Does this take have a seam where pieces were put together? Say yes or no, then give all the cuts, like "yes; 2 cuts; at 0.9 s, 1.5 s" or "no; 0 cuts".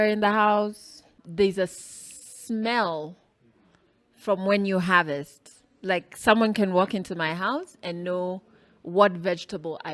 yes; 1 cut; at 1.2 s